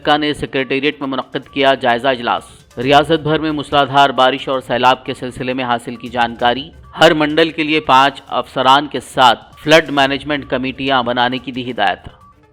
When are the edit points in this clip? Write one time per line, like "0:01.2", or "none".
none